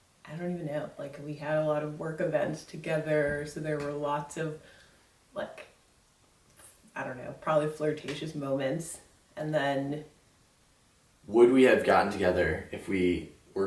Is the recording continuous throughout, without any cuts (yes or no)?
yes